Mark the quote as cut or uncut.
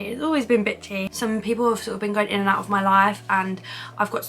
cut